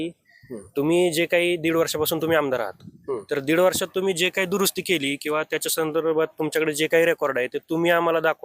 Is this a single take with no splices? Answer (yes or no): yes